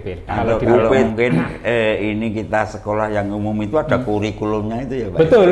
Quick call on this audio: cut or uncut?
cut